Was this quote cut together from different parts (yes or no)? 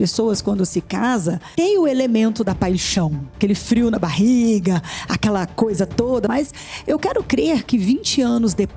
yes